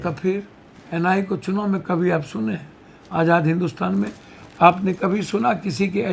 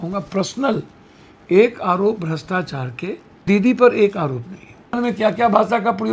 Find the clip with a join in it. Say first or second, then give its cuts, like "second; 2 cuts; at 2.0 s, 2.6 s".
second; 2 cuts; at 3.5 s, 5.0 s